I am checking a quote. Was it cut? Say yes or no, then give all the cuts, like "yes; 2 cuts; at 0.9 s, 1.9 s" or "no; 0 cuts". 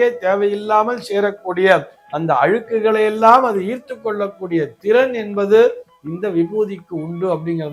no; 0 cuts